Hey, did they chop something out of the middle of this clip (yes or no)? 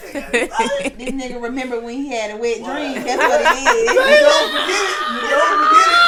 no